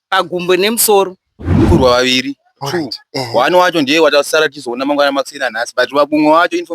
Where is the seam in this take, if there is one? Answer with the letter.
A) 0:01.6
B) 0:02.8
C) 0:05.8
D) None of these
A